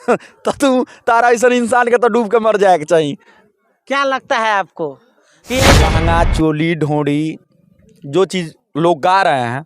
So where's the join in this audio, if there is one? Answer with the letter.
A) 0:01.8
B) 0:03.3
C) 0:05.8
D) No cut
C